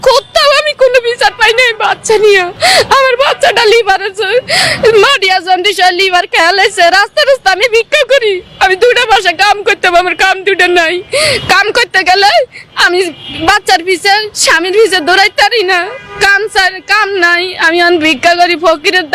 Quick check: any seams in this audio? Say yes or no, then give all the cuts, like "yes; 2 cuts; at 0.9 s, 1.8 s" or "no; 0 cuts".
no; 0 cuts